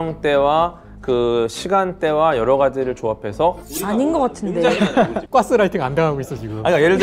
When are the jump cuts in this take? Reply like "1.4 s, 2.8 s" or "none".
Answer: 3.7 s, 5.2 s